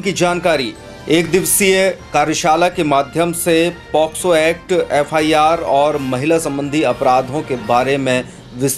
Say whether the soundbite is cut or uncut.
uncut